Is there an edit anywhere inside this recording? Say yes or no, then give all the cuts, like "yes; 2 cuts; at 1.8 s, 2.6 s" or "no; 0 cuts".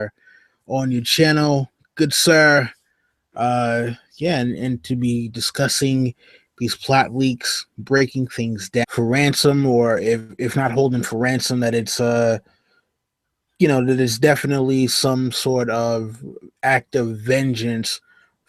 no; 0 cuts